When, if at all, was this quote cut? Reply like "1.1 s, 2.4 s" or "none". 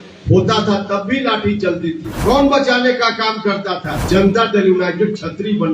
2.1 s, 3.9 s